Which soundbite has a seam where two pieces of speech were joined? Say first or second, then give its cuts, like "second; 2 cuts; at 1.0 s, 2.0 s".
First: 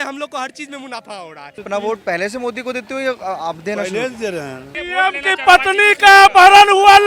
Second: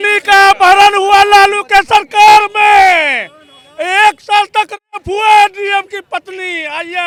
first; 2 cuts; at 1.6 s, 4.7 s